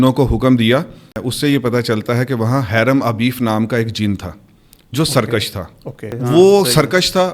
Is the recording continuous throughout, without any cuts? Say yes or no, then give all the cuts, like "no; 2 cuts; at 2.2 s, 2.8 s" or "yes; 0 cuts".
no; 2 cuts; at 1.2 s, 6.1 s